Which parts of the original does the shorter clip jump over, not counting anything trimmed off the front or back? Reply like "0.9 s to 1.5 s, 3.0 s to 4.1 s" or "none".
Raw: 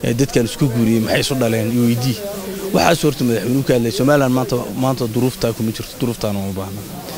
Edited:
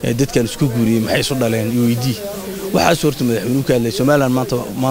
none